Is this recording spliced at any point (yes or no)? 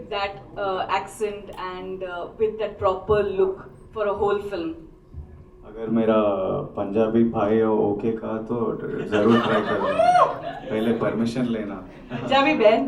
no